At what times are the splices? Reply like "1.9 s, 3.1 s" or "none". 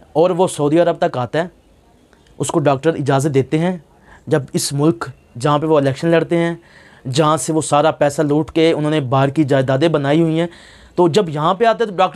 none